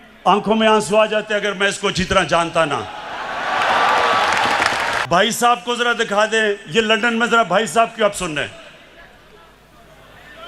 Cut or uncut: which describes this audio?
cut